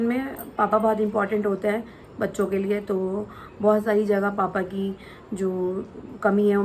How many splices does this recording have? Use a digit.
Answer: 0